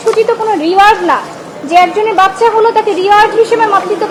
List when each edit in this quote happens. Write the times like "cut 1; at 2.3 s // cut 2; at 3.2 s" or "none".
none